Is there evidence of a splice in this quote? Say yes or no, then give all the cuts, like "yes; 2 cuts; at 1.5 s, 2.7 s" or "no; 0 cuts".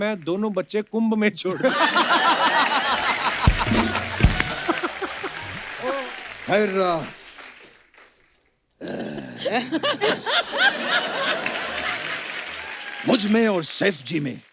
yes; 1 cut; at 6.0 s